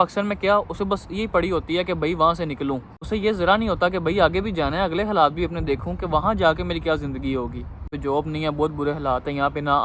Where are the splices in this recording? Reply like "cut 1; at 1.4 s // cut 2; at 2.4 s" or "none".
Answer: cut 1; at 2.9 s // cut 2; at 8.0 s